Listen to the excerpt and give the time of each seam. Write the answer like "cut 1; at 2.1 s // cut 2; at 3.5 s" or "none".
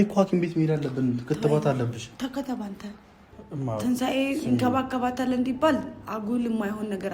cut 1; at 3.3 s